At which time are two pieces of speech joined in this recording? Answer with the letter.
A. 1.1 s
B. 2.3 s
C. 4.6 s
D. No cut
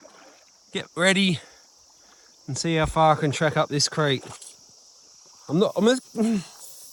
D